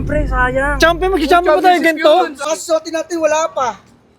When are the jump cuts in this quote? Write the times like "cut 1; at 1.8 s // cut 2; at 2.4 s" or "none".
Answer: cut 1; at 2.5 s